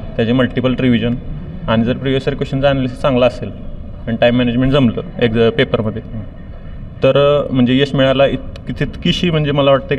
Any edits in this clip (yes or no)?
no